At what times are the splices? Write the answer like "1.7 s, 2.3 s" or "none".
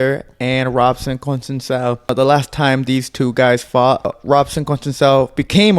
2.1 s, 4.2 s